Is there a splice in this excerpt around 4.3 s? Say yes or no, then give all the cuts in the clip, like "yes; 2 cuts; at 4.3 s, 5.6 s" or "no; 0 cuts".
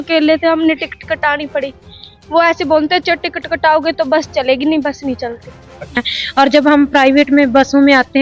no; 1 cut; at 5.9 s